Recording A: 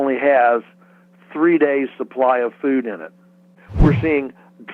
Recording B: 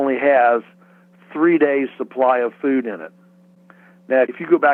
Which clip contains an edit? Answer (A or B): A